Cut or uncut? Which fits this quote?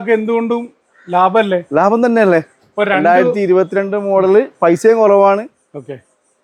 uncut